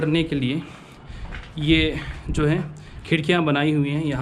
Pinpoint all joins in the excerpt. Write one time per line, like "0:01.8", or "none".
none